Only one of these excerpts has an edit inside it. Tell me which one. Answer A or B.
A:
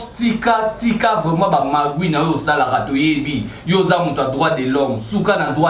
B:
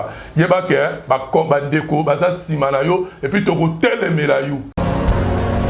B